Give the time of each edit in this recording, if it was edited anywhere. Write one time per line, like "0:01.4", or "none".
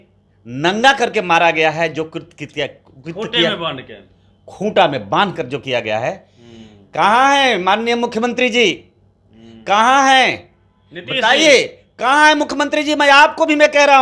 none